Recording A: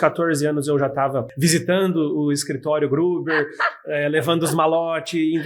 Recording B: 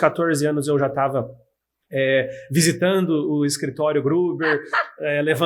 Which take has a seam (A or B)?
A